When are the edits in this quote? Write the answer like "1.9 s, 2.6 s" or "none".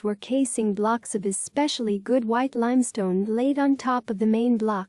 none